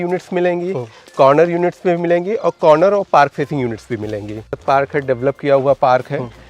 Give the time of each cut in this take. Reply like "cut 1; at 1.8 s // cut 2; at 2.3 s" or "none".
cut 1; at 4.6 s